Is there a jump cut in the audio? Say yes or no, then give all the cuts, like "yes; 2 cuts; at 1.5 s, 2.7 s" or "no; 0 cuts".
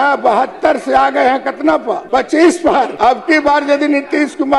yes; 2 cuts; at 2.0 s, 2.9 s